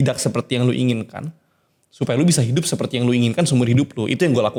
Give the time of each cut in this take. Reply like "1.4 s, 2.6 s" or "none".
none

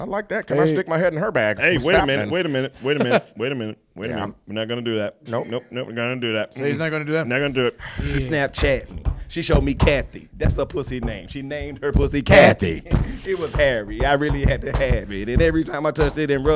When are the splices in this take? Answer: 8.0 s

